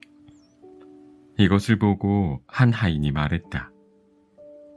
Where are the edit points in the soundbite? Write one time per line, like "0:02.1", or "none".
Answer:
0:01.3
0:03.8